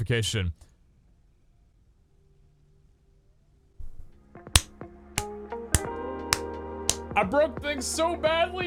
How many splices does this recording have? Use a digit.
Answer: 0